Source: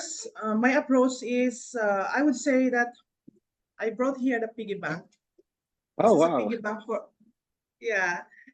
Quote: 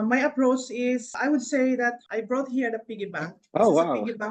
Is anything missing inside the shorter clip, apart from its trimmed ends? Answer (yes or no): yes